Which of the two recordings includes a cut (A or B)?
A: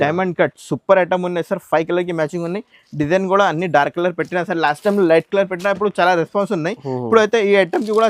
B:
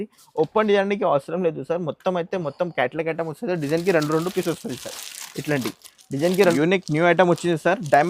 B